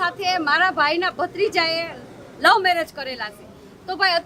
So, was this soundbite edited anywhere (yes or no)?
no